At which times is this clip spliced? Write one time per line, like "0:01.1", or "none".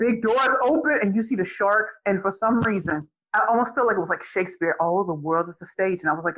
0:03.2

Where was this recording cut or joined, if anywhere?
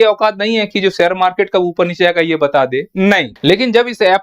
0:03.3

